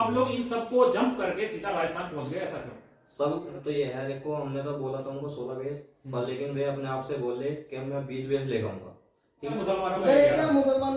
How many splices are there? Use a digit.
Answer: 2